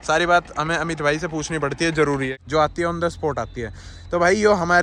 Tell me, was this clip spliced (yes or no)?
yes